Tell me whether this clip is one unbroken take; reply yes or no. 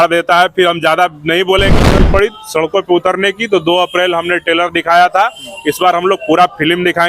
no